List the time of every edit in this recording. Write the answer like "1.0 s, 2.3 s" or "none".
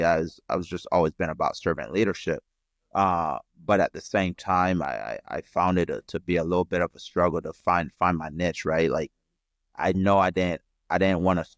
none